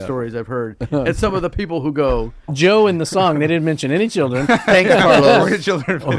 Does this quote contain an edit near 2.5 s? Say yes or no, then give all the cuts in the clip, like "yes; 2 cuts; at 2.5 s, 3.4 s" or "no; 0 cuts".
yes; 1 cut; at 2.5 s